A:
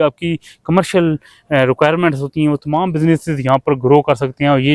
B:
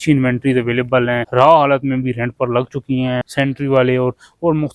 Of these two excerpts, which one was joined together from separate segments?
B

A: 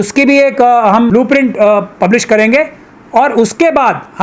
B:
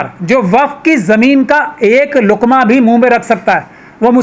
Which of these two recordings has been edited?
A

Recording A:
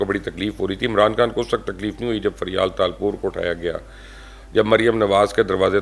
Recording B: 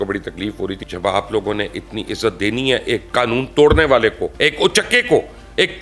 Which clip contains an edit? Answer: B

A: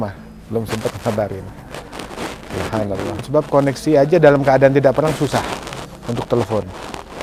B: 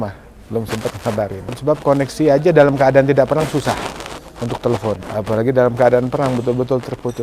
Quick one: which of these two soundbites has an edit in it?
B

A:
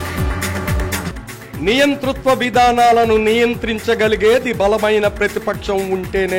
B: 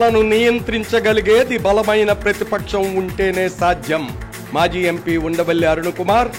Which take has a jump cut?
A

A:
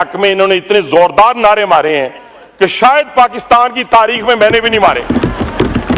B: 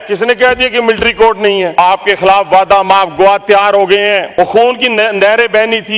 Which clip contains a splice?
B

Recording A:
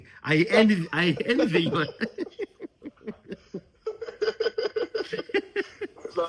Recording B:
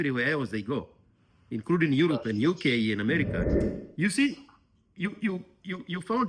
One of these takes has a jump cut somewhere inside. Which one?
B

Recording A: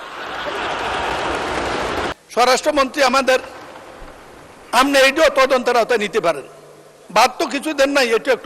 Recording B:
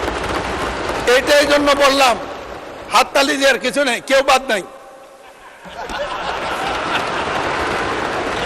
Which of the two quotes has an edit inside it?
A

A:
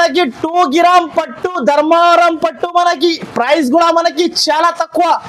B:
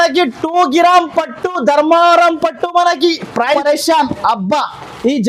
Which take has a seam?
B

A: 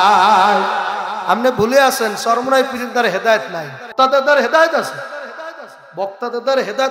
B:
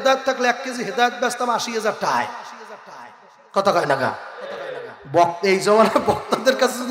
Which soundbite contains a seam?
A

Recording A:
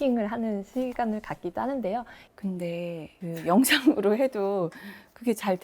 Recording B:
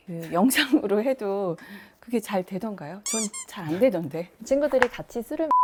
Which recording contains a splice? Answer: A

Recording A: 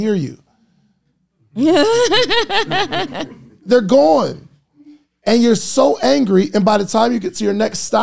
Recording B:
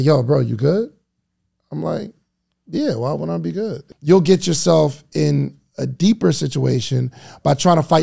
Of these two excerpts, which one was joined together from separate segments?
B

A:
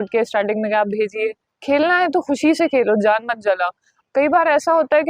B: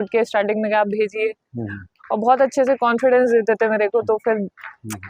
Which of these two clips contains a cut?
A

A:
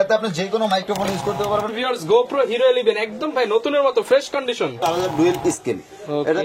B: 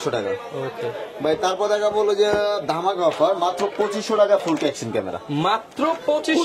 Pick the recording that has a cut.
A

